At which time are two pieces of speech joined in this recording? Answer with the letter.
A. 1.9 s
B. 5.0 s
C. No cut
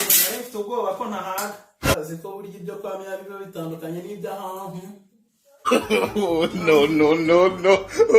A